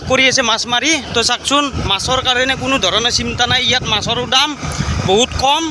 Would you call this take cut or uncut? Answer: uncut